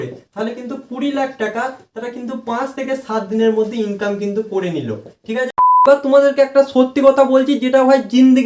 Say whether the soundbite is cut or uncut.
cut